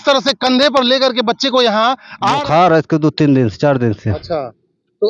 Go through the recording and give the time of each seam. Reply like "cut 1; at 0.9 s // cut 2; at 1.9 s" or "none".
cut 1; at 2.3 s